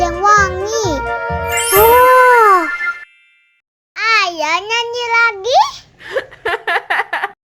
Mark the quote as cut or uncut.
uncut